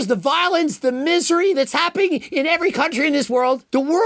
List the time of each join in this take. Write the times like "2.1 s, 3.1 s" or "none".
none